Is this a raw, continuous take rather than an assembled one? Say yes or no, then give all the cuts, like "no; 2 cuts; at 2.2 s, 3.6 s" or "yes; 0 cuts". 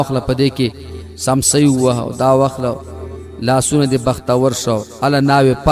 yes; 0 cuts